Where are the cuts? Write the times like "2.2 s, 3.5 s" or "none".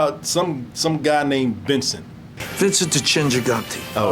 2.4 s